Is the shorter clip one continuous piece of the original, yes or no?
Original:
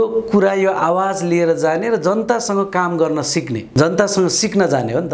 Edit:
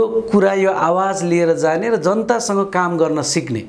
yes